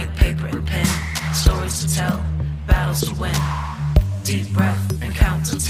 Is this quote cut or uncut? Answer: uncut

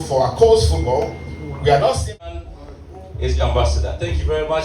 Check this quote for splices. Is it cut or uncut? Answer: cut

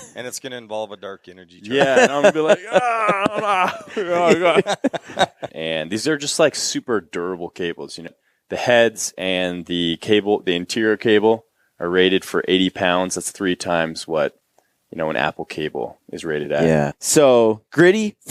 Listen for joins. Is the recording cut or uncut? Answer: cut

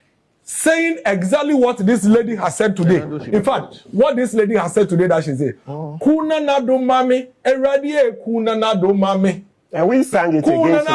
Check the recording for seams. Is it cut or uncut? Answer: uncut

